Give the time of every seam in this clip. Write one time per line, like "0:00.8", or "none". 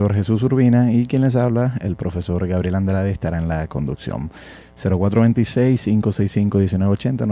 0:02.1